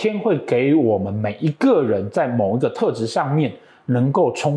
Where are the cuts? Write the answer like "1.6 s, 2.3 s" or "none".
none